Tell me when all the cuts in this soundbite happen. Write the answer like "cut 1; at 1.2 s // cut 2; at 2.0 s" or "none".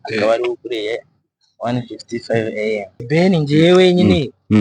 cut 1; at 2.9 s